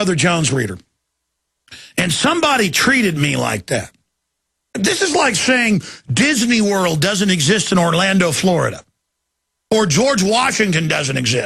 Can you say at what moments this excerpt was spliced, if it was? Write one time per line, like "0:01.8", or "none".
0:09.9